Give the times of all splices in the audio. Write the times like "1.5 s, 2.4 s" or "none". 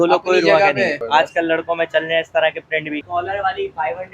1.0 s, 3.0 s